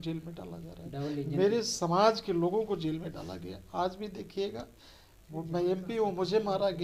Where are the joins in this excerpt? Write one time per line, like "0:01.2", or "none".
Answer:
none